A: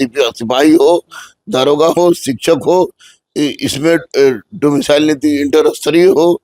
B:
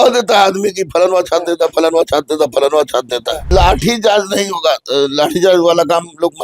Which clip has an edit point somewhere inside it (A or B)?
B